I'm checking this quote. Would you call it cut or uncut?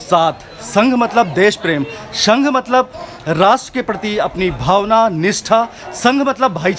uncut